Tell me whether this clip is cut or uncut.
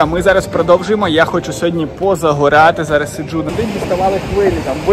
cut